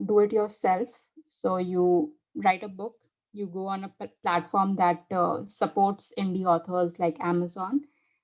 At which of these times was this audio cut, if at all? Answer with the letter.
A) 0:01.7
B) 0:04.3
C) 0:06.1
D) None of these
D